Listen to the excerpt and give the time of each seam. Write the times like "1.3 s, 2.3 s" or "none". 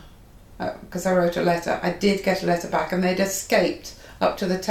none

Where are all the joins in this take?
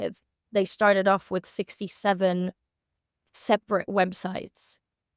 none

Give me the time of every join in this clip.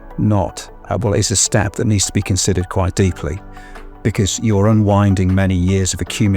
3.8 s

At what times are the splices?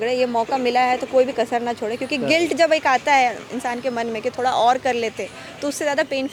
none

